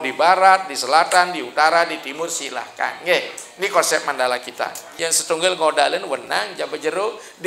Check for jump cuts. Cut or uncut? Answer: cut